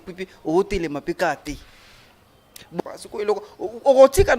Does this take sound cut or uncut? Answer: uncut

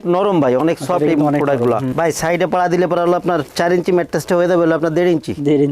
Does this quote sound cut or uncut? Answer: cut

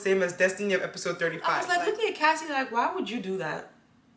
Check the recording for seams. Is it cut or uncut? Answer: cut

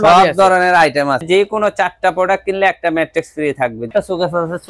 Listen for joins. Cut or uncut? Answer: cut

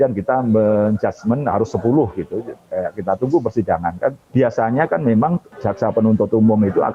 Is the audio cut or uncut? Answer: cut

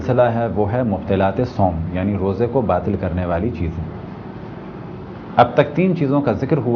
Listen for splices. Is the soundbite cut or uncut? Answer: uncut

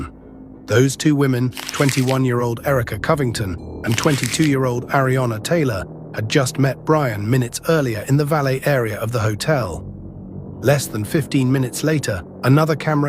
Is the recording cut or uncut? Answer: cut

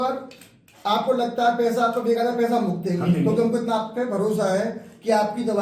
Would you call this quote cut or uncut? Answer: uncut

